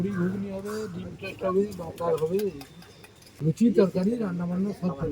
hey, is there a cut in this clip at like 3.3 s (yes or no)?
yes